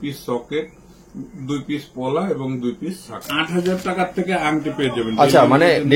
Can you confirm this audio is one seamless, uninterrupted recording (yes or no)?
no